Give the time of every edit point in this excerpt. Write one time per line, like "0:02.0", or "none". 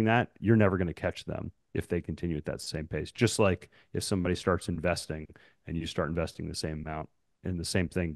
none